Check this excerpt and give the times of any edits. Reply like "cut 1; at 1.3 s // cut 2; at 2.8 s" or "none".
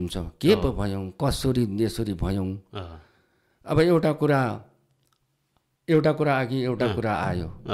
none